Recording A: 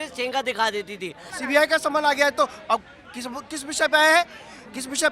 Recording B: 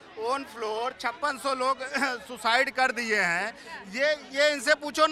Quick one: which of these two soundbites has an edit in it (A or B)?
A